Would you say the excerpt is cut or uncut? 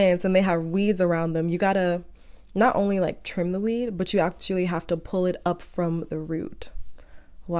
uncut